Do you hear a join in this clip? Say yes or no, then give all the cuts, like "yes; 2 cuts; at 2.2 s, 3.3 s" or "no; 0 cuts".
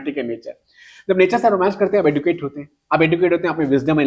no; 0 cuts